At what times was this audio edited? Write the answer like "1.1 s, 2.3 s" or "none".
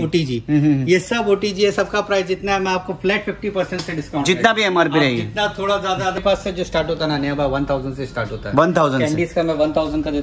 6.2 s